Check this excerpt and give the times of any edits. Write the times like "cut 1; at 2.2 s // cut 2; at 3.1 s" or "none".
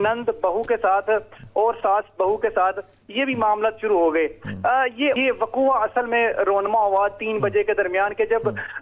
cut 1; at 5.2 s